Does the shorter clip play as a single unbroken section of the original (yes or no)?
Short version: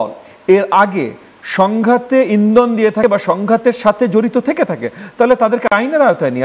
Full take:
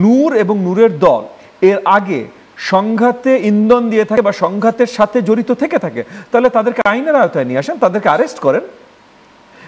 yes